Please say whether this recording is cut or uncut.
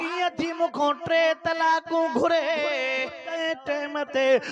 cut